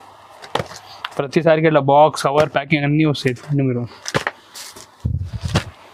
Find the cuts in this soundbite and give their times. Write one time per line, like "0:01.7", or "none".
none